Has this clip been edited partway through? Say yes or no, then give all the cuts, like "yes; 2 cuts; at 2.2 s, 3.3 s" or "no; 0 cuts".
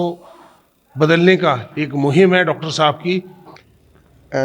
yes; 1 cut; at 3.4 s